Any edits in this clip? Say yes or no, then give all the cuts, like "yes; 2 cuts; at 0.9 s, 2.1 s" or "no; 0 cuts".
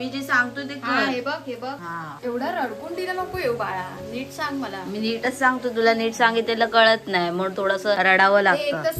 no; 0 cuts